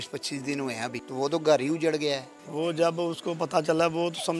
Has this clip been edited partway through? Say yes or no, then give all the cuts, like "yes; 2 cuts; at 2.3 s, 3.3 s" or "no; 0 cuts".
yes; 2 cuts; at 1.0 s, 2.4 s